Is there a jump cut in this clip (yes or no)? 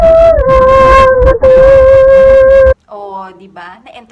yes